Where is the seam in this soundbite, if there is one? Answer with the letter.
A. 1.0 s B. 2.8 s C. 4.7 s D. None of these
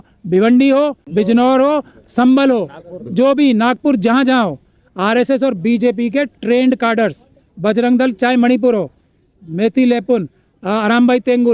A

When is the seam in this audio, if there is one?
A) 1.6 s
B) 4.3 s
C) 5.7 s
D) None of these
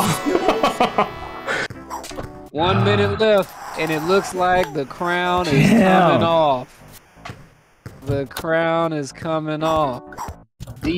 A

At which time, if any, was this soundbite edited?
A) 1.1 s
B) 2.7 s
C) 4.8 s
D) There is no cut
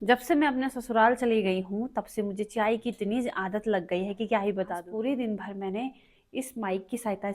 C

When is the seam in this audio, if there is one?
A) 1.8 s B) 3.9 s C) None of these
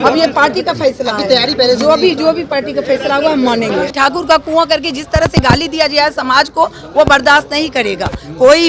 B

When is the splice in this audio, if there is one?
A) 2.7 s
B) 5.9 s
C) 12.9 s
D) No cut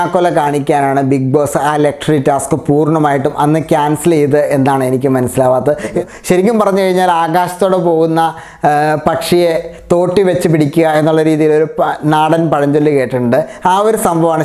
B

